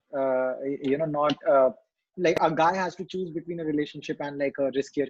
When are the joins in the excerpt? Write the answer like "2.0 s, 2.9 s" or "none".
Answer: 2.0 s